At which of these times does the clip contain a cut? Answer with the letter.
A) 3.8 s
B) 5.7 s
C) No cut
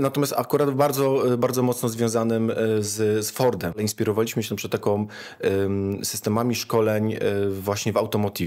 A